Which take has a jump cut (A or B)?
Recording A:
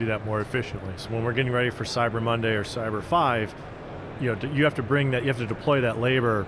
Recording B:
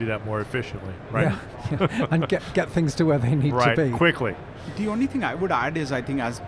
A